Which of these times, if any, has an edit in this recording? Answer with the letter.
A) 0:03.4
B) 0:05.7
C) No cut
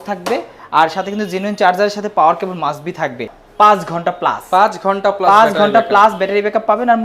A